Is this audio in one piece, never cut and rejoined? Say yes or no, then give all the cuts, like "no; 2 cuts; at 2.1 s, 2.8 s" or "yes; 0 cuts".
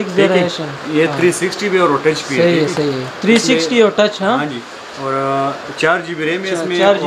yes; 0 cuts